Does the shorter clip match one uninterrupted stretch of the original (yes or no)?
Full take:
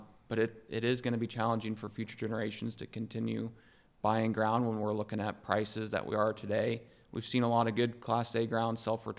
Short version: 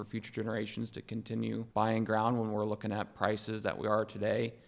no